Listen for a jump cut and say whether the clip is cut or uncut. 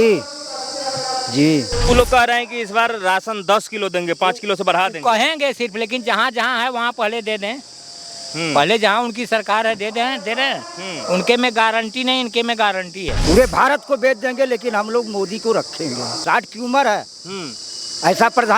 cut